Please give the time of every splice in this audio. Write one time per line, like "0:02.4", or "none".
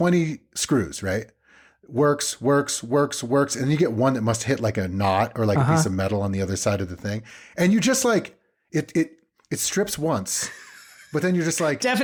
none